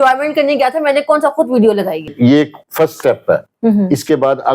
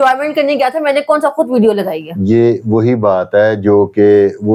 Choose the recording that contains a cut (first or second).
first